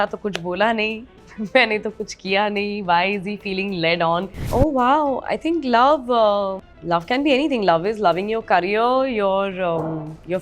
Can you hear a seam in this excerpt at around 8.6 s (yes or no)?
no